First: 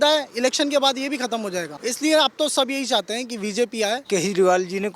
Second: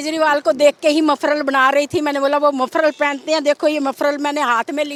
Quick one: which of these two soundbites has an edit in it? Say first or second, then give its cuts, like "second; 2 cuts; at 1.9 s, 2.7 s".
first; 2 cuts; at 1.8 s, 4.0 s